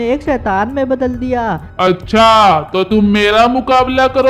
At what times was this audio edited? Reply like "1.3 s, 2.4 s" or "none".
1.7 s

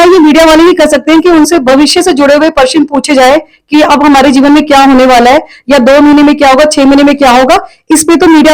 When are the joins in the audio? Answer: none

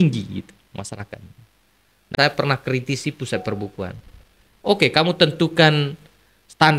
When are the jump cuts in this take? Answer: 2.1 s

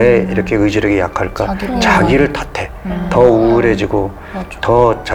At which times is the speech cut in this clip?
none

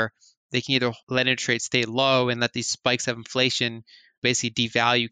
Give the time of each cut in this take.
1.0 s, 4.2 s

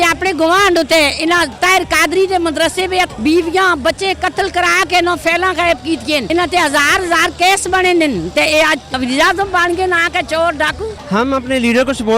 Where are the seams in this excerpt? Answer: 3.1 s, 6.2 s, 8.9 s, 10.9 s

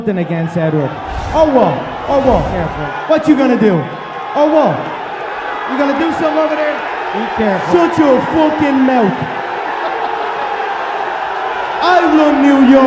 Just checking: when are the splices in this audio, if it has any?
none

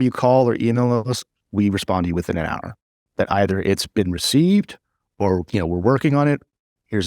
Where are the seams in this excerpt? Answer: none

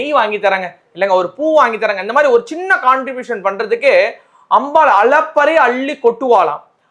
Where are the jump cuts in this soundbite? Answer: none

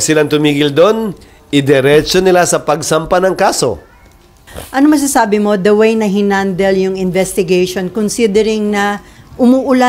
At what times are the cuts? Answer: 4.4 s

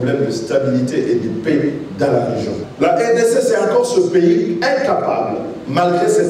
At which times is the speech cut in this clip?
2.6 s

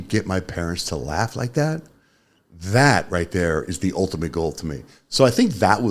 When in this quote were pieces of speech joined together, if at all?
none

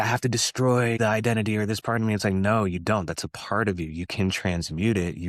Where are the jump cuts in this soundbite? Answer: 1.0 s

